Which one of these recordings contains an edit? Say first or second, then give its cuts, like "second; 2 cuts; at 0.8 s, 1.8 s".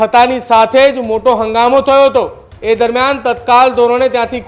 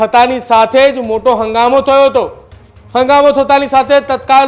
first; 1 cut; at 2.5 s